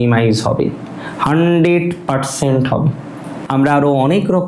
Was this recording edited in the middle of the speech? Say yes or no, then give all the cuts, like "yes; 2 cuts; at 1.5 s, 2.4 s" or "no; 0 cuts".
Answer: yes; 1 cut; at 3.4 s